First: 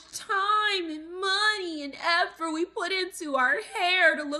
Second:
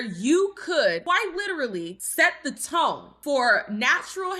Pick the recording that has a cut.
second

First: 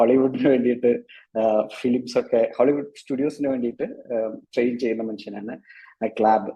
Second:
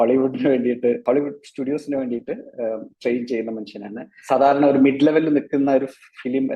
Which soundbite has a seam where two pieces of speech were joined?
second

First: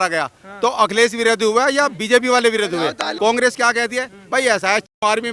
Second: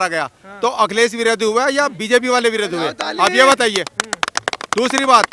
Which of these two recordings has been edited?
first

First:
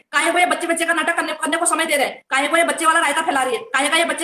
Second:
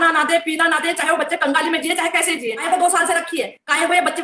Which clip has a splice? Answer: second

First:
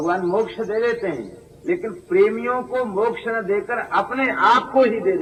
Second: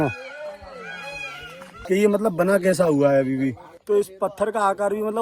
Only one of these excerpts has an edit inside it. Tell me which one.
second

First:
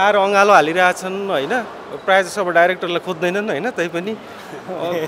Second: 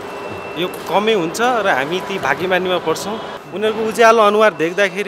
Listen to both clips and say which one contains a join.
second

